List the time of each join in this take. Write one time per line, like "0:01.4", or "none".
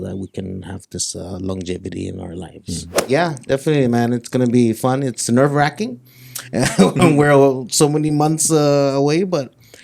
0:03.1